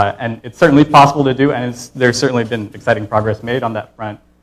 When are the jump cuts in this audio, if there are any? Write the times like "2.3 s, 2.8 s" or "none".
1.3 s